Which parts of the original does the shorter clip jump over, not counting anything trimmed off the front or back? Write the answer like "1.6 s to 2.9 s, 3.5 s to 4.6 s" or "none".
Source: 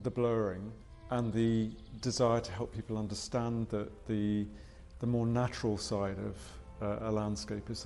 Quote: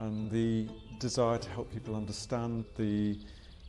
3.7 s to 3.9 s